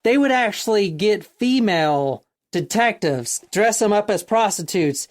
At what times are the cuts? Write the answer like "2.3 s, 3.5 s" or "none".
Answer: 2.3 s, 3.4 s